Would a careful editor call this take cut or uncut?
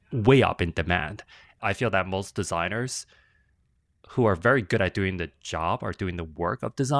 cut